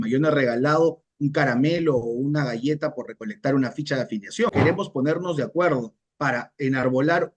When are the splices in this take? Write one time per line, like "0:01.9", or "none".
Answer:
0:04.5